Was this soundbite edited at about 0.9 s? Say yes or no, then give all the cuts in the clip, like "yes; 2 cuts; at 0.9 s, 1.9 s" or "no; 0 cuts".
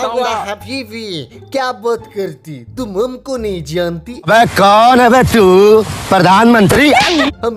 no; 0 cuts